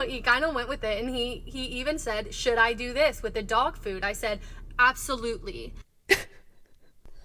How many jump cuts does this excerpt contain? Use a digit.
0